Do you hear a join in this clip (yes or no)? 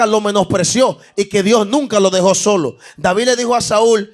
no